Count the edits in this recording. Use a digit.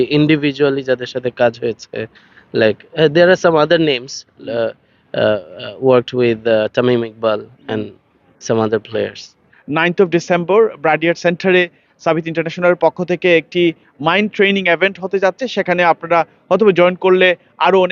1